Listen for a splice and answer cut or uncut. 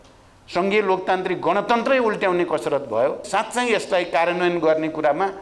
cut